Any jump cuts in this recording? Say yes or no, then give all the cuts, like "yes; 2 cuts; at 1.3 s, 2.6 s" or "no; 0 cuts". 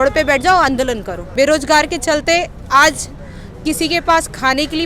yes; 1 cut; at 1.2 s